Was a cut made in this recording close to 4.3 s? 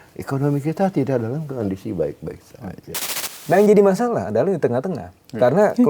no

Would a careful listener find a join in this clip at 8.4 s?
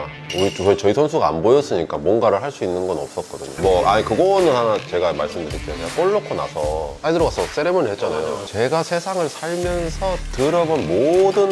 yes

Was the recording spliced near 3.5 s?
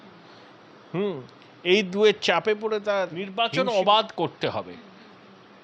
yes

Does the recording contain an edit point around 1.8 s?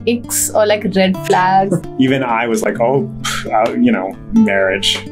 yes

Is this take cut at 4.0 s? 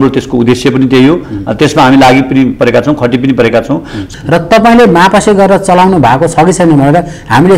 yes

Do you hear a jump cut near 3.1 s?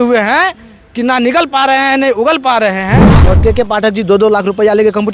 yes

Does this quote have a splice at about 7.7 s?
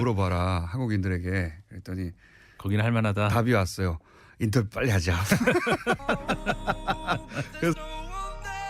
yes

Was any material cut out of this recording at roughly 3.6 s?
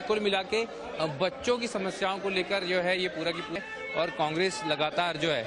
yes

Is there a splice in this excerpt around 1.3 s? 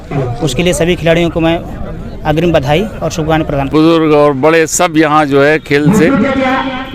no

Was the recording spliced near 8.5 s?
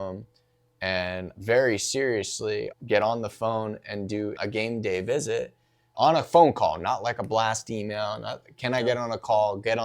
no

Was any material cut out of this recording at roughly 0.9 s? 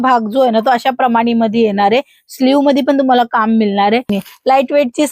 no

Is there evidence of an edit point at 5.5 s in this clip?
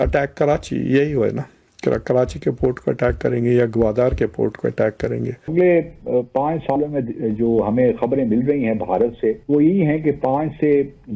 yes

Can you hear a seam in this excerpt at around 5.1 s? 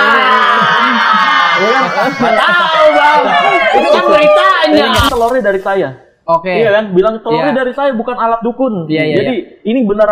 yes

